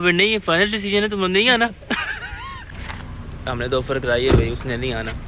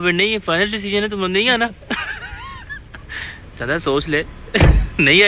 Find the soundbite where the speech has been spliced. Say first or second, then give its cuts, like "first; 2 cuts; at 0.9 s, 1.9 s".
first; 1 cut; at 3.0 s